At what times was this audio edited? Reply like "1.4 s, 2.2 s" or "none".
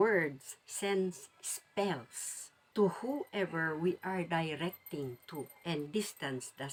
none